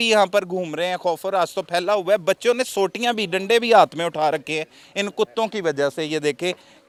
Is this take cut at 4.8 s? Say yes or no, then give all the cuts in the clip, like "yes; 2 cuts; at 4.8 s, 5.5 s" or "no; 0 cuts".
no; 0 cuts